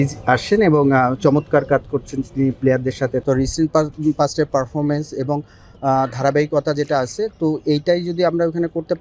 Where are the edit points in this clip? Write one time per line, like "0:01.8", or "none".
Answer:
0:03.2